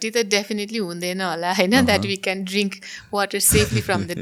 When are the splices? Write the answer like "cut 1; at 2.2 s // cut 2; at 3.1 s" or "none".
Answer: none